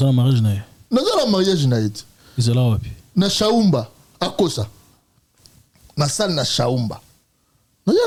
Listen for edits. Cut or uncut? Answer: uncut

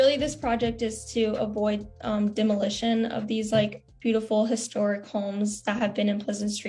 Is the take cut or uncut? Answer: uncut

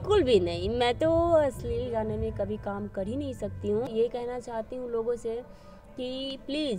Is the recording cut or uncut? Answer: cut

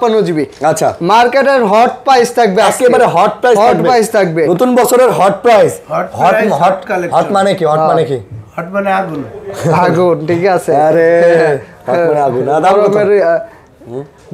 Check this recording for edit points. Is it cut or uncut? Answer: uncut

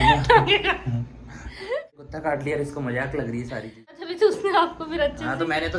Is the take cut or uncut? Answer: cut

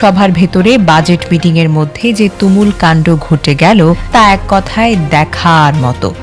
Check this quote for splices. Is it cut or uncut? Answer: cut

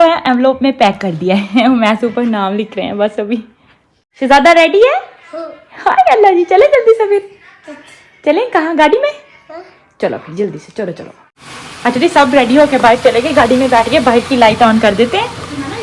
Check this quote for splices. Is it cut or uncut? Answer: uncut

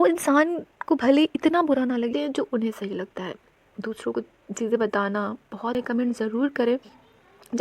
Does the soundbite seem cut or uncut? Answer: cut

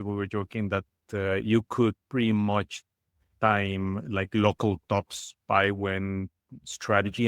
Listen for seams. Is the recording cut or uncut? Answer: uncut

